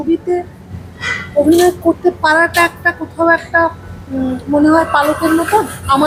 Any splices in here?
no; 0 cuts

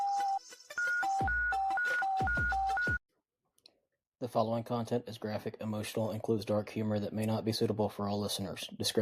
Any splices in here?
no; 0 cuts

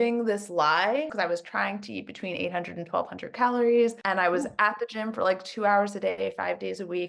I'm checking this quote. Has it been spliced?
yes; 2 cuts; at 1.1 s, 4.0 s

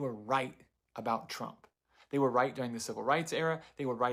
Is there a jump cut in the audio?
no; 0 cuts

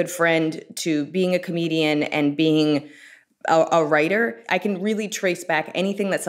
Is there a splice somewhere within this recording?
yes; 1 cut; at 4.4 s

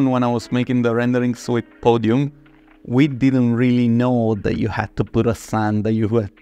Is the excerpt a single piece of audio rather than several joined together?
yes; 0 cuts

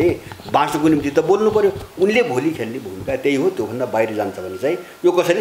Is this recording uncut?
yes; 0 cuts

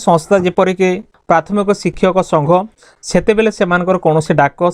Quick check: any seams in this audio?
yes; 2 cuts; at 1.1 s, 2.8 s

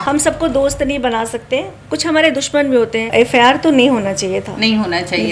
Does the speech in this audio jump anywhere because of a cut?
yes; 1 cut; at 3.1 s

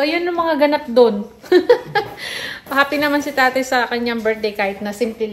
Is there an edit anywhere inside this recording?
no; 0 cuts

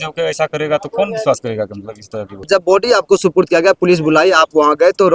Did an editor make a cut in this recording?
yes; 1 cut; at 2.4 s

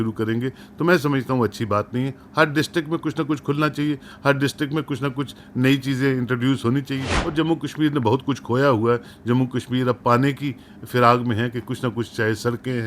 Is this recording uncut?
no; 1 cut; at 7.2 s

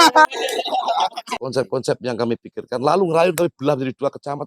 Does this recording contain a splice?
yes; 1 cut; at 1.3 s

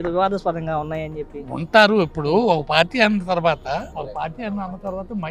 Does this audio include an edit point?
no; 0 cuts

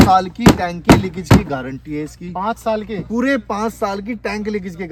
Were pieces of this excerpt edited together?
no; 0 cuts

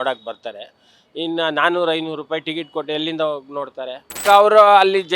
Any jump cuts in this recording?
yes; 1 cut; at 4.2 s

